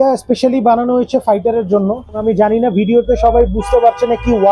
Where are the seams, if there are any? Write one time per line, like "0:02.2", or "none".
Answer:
0:02.2